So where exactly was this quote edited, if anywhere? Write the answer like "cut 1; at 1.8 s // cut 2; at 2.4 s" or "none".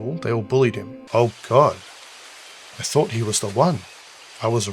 cut 1; at 1.0 s